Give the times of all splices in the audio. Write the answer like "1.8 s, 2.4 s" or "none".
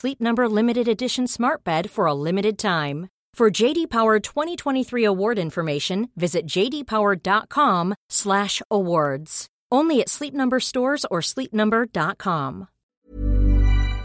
12.9 s